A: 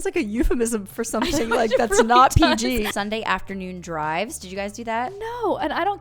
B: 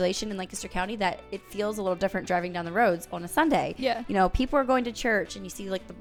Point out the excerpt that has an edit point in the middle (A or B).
A